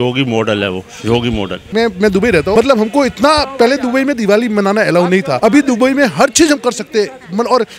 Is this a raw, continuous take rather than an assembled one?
no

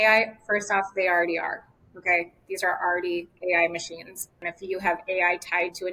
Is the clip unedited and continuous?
no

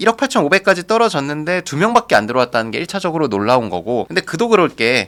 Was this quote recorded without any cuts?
yes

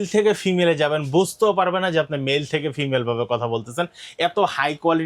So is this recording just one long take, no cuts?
yes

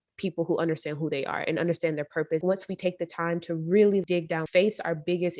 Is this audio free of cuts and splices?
no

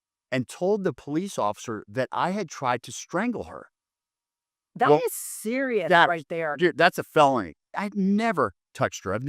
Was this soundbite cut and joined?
yes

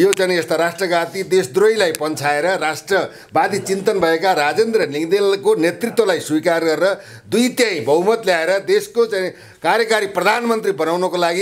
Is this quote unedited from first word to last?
yes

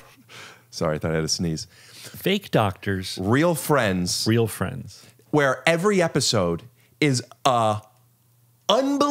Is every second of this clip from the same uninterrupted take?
no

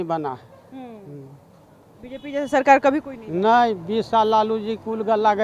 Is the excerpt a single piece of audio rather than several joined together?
yes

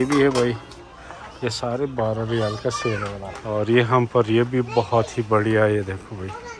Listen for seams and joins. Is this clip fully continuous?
no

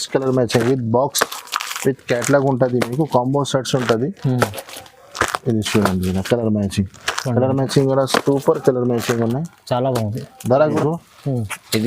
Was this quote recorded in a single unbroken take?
no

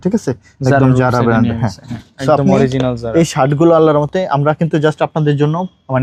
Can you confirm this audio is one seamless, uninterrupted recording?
yes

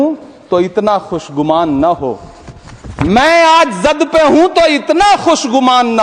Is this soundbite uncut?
yes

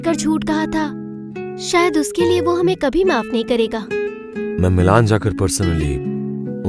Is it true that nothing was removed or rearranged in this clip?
yes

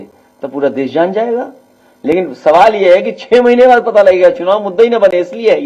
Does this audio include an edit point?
no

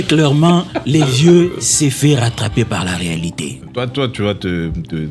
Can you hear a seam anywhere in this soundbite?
yes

